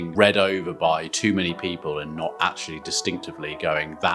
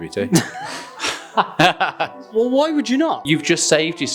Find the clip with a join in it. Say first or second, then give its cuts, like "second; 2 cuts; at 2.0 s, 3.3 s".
second; 2 cuts; at 2.2 s, 3.2 s